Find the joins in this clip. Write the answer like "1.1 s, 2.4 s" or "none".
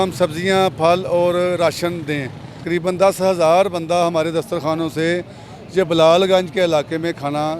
2.6 s